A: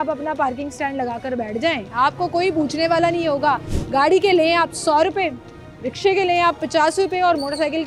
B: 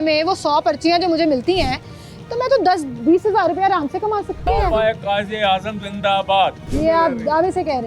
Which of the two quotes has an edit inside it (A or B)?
B